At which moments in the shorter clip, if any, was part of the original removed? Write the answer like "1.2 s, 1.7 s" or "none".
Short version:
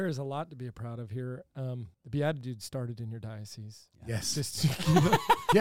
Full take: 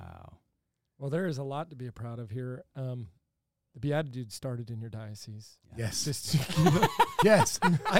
1.9 s